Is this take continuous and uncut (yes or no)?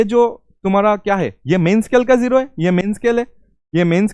yes